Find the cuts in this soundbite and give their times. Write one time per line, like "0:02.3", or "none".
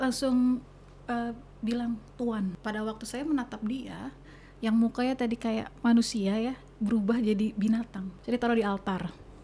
0:02.6
0:08.1